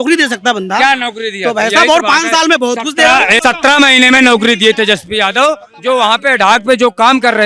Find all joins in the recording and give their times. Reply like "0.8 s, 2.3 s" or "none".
3.3 s